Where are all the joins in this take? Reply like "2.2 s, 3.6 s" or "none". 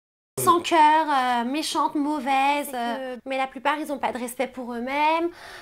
3.1 s